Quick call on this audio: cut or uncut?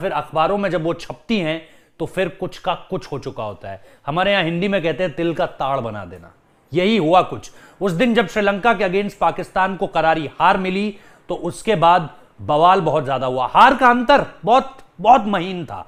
uncut